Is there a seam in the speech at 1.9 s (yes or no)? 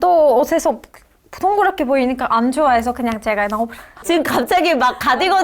no